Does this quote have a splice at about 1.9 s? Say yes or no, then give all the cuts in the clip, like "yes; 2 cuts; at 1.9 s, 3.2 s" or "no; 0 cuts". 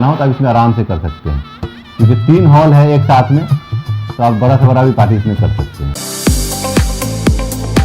no; 1 cut; at 5.9 s